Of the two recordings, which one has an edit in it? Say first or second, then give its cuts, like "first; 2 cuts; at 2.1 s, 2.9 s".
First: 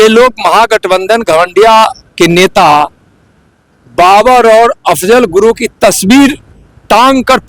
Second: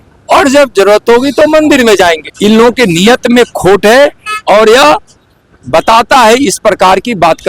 second; 1 cut; at 2.3 s